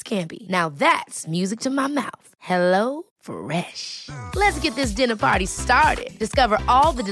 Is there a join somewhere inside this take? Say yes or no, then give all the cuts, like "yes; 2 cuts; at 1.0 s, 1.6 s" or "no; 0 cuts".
no; 0 cuts